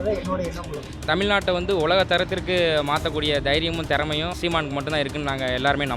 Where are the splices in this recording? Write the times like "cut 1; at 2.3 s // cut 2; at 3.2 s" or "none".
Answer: cut 1; at 1.0 s // cut 2; at 4.3 s